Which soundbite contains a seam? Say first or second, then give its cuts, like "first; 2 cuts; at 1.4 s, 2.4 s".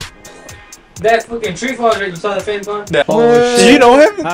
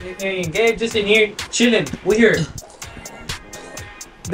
first; 1 cut; at 3.1 s